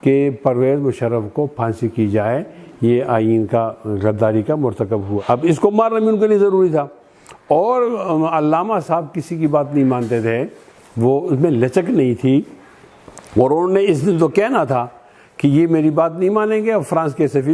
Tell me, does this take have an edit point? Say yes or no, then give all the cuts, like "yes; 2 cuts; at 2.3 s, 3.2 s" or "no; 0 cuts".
yes; 1 cut; at 5.2 s